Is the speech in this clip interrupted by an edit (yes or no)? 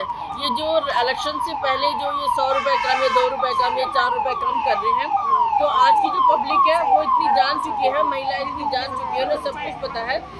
no